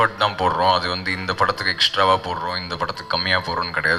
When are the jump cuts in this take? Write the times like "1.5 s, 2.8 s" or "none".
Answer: none